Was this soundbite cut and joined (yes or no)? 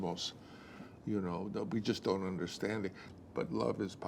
yes